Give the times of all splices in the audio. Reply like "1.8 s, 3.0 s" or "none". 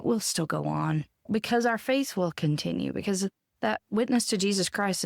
1.3 s